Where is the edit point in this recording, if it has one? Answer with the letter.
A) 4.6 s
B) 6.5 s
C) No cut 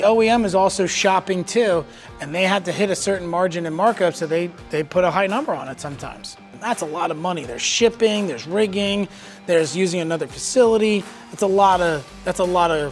B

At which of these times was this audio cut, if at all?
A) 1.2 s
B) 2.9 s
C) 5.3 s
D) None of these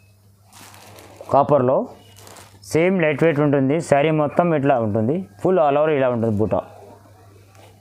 D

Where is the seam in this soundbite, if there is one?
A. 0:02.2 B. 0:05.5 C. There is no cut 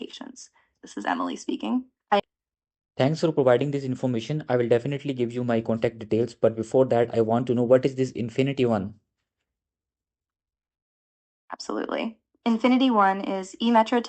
A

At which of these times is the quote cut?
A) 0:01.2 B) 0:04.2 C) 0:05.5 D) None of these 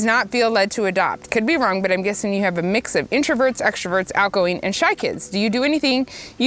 A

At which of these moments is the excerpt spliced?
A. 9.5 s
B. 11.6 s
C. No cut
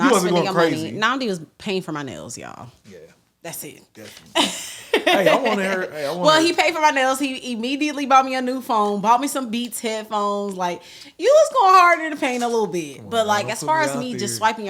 C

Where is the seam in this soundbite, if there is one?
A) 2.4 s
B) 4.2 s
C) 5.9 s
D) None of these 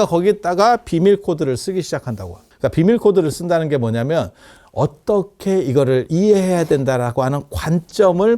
A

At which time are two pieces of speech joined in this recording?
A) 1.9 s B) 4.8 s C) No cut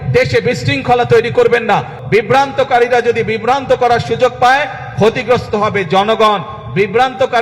A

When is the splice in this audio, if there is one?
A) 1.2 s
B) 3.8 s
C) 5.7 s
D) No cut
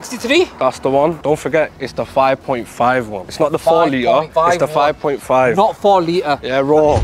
A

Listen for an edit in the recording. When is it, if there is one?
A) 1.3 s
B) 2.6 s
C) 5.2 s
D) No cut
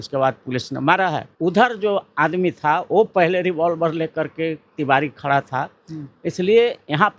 A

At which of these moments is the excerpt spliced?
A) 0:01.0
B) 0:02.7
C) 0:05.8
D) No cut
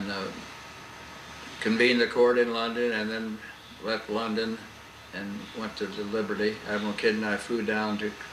B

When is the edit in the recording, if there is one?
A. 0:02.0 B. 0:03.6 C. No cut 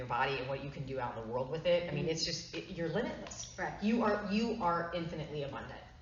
C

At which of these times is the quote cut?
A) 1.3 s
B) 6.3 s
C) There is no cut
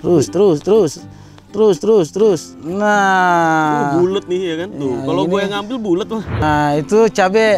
B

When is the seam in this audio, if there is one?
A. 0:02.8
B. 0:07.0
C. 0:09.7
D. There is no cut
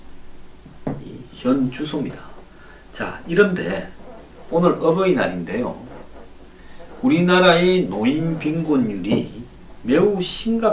D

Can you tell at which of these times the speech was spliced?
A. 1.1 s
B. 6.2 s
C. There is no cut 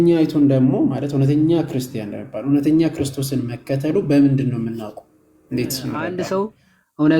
B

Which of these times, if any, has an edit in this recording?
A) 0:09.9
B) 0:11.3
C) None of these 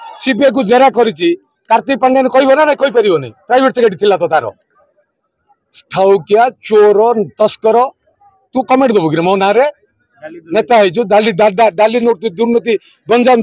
C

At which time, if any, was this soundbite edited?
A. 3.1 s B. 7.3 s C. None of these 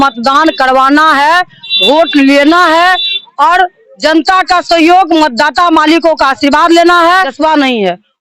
B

